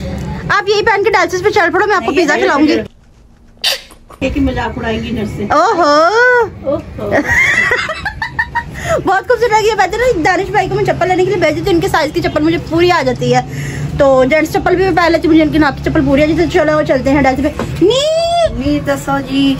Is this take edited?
no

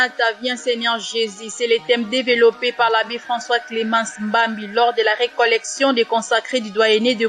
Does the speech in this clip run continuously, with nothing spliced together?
yes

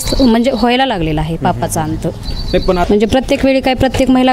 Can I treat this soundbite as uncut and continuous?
no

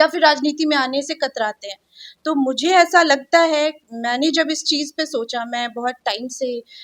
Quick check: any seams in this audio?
no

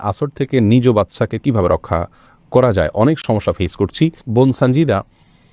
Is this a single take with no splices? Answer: yes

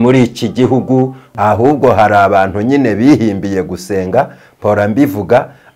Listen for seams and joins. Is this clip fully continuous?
no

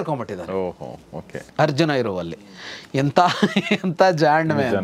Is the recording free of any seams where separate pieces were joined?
yes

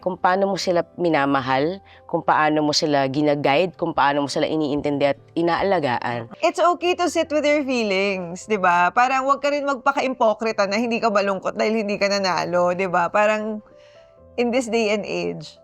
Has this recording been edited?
yes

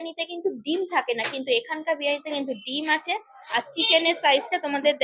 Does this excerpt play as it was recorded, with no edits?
yes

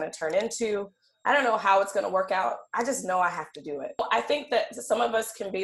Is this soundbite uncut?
no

